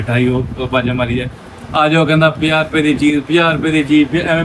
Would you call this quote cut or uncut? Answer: uncut